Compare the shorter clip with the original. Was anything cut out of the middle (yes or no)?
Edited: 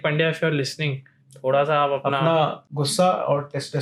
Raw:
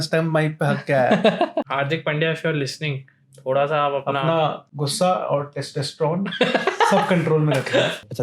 no